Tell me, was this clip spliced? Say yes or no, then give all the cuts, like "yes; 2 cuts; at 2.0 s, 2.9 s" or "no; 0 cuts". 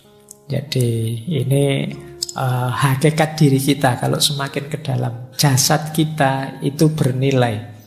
no; 0 cuts